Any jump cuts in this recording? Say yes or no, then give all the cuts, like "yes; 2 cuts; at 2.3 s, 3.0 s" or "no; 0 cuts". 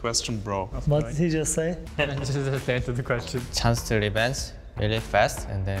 yes; 2 cuts; at 1.8 s, 3.4 s